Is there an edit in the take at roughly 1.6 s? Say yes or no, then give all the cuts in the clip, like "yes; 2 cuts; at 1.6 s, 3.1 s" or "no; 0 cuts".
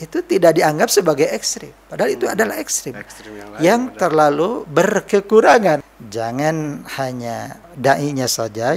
no; 2 cuts; at 5.8 s, 7.6 s